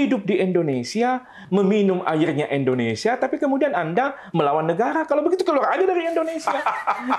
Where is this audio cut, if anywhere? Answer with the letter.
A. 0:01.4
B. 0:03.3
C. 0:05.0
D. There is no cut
A